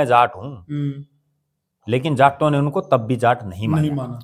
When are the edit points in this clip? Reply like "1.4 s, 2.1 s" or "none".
none